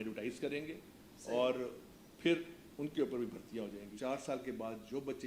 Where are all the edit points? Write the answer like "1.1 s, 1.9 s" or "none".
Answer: 3.8 s